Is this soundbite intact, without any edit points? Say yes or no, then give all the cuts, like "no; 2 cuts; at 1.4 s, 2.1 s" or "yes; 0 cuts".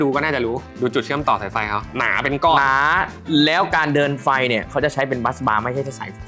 yes; 0 cuts